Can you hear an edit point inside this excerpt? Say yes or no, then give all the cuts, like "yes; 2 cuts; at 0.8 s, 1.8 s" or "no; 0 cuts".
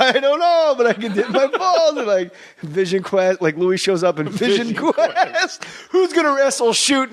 yes; 1 cut; at 2.5 s